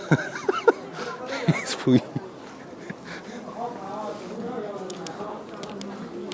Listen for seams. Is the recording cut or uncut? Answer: uncut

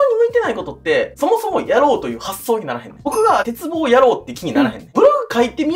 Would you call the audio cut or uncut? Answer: uncut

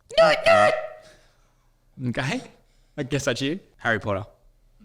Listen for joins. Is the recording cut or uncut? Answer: cut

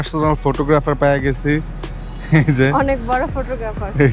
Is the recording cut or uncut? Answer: uncut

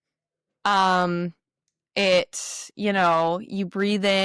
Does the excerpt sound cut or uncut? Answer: uncut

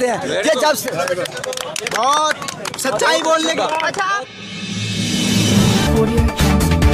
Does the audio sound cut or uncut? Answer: cut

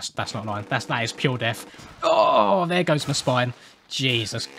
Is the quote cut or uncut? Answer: uncut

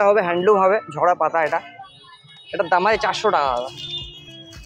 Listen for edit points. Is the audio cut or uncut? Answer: uncut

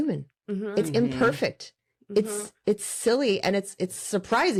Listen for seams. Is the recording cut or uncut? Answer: uncut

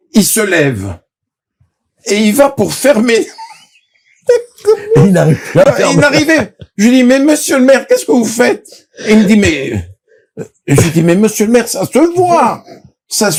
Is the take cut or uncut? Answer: uncut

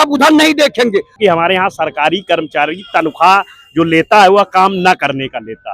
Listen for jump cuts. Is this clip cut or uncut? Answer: cut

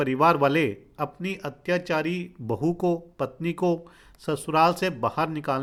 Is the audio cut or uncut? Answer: uncut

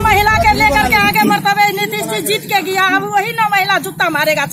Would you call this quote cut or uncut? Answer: uncut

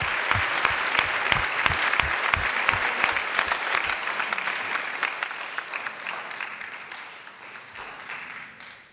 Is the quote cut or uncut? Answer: uncut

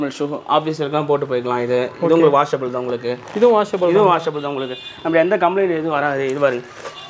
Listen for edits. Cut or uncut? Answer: uncut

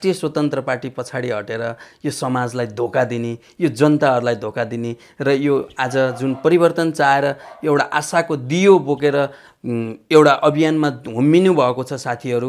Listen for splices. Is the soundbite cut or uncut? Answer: uncut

